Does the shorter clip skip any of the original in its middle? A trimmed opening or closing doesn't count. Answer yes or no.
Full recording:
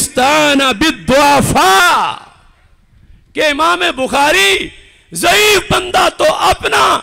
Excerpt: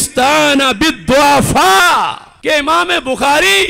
yes